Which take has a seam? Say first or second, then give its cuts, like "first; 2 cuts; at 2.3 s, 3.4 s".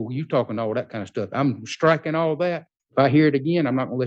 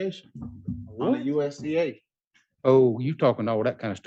first; 1 cut; at 2.7 s